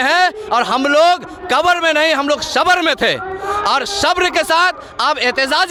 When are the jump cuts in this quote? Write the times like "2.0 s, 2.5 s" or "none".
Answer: none